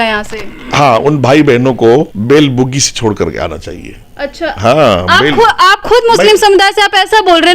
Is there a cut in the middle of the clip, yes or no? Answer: yes